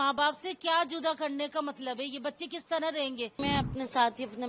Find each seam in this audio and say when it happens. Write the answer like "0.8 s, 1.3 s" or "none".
3.4 s

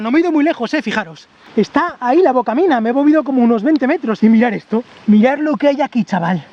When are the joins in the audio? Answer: 4.9 s

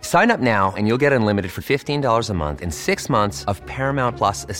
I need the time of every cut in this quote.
none

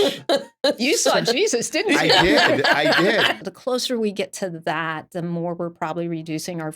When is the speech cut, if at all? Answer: 3.4 s

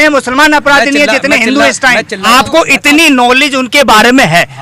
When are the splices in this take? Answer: 2.2 s

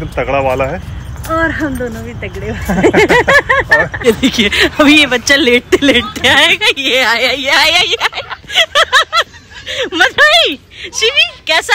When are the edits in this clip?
4.1 s

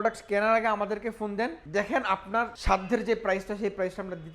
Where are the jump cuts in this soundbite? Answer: 1.6 s, 2.6 s

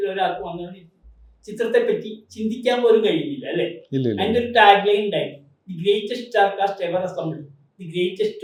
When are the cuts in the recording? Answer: none

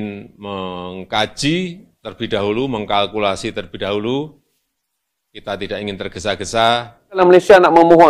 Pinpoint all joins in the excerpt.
7.0 s

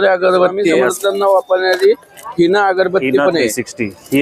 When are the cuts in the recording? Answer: 0.9 s

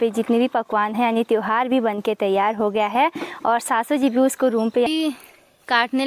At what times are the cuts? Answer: 4.9 s

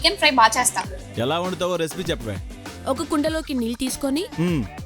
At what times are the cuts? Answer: 1.0 s

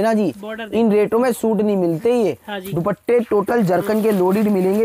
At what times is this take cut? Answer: none

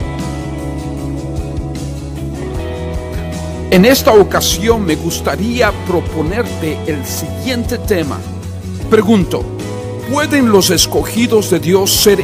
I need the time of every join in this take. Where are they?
none

